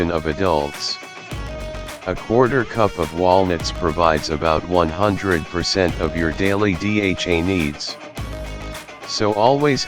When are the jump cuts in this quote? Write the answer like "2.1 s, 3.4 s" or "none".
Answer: 0.7 s, 2.0 s, 7.8 s, 9.2 s